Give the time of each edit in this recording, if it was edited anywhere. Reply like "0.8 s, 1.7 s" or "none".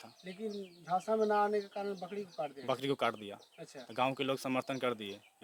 none